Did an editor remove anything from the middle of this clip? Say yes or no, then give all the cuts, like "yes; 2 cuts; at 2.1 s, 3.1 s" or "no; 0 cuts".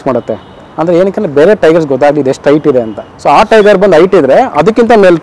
no; 0 cuts